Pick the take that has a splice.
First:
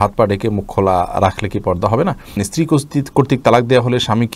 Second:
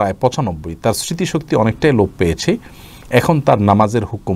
first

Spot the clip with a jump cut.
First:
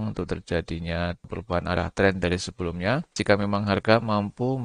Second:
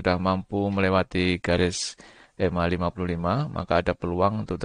first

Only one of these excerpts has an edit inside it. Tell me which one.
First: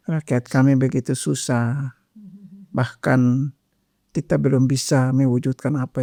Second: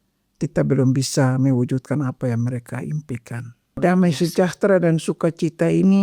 second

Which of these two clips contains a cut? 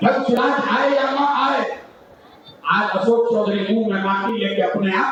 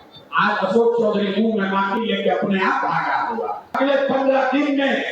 second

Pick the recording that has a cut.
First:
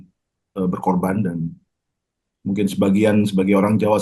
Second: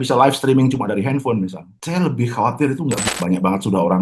second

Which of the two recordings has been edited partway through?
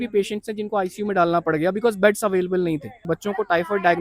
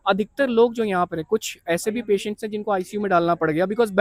first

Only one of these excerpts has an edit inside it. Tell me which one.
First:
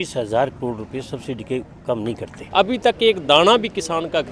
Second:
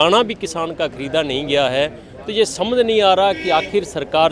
first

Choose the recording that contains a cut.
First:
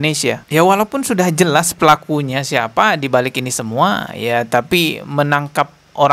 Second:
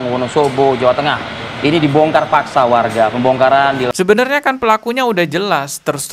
second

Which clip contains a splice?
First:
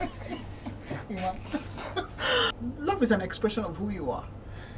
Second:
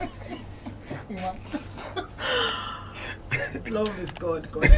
first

